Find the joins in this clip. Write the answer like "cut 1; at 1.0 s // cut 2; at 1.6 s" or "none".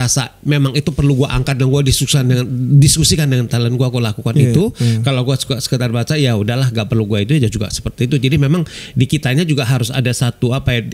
none

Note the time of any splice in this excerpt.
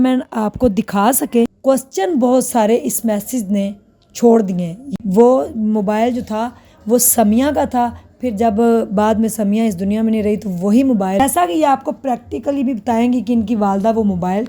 cut 1; at 1.6 s // cut 2; at 4.8 s // cut 3; at 11.2 s

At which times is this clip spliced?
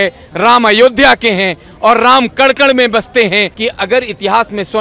cut 1; at 3.6 s

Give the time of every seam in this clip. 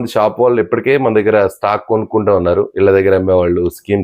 none

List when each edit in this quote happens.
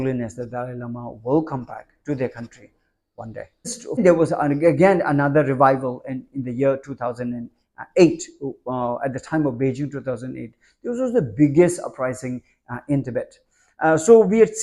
cut 1; at 3.9 s

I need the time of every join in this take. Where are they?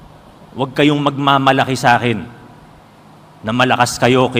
none

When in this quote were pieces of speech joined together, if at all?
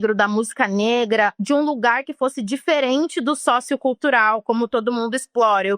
cut 1; at 1.4 s

